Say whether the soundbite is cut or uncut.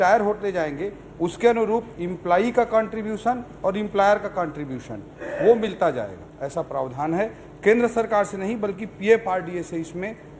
uncut